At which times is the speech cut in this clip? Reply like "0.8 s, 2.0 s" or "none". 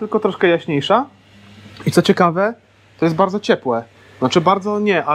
none